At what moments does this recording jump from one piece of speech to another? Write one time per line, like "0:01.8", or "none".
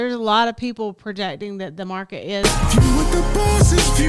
0:02.4